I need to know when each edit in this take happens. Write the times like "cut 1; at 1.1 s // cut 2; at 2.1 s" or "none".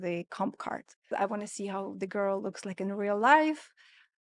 cut 1; at 1.1 s